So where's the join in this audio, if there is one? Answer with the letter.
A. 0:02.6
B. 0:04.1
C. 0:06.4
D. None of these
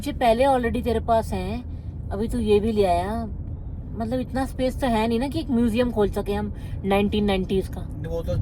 D